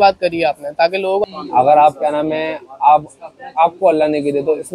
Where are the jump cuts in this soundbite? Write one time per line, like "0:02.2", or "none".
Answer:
0:01.2